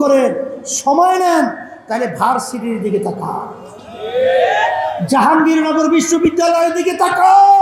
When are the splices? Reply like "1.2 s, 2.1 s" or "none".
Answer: none